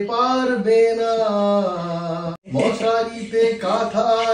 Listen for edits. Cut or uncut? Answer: cut